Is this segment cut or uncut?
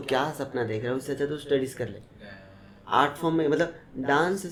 uncut